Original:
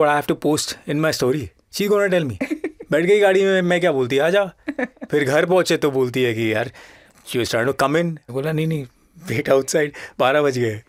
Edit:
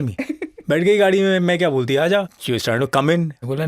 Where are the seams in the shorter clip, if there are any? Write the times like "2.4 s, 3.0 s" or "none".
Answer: 2.4 s